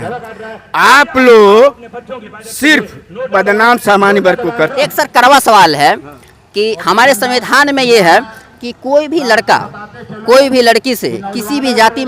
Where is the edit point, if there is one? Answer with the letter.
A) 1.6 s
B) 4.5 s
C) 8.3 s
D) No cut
B